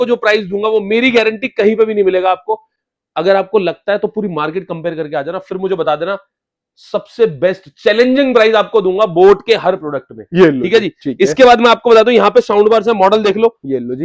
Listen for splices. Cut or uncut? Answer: uncut